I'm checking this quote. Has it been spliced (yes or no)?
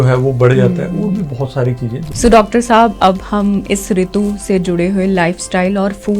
yes